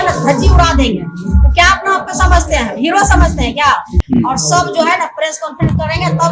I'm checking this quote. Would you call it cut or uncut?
cut